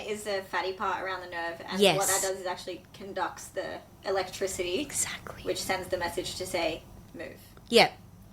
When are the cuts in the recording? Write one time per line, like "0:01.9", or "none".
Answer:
none